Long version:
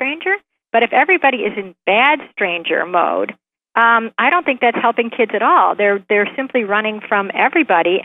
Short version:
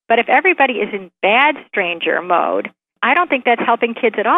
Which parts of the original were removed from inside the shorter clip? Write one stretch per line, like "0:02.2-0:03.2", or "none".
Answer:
0:03.6-0:04.1